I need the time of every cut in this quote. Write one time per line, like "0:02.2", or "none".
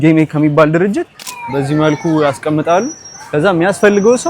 0:01.3